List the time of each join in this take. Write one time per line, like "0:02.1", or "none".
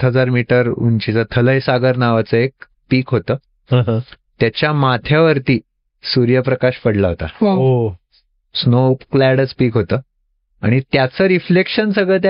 none